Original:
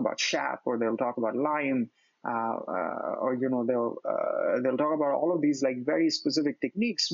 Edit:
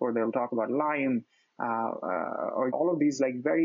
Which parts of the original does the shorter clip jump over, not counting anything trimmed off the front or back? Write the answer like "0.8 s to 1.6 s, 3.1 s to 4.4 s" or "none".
3.4 s to 5.2 s